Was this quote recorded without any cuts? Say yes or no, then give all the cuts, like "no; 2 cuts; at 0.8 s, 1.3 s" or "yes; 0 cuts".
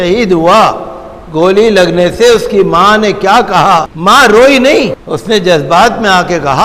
no; 2 cuts; at 3.9 s, 5.0 s